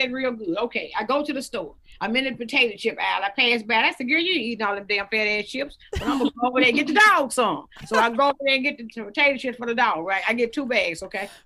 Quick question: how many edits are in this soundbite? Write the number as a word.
zero